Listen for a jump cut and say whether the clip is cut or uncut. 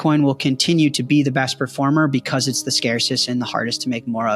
uncut